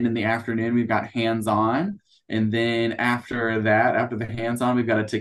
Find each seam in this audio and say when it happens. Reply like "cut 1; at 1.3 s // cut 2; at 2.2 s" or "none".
none